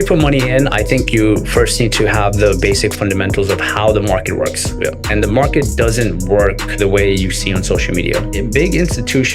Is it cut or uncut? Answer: uncut